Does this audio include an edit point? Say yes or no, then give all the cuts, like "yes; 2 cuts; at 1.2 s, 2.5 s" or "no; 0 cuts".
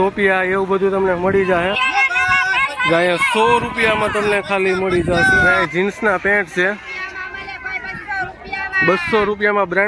yes; 2 cuts; at 1.8 s, 5.5 s